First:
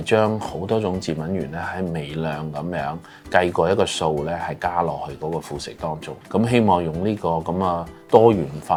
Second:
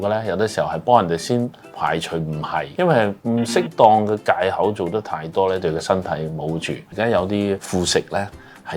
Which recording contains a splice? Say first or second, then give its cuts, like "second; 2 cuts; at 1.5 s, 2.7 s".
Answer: second; 2 cuts; at 2.7 s, 6.8 s